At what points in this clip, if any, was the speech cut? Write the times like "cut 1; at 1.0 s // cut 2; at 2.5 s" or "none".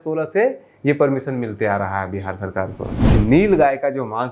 cut 1; at 3.1 s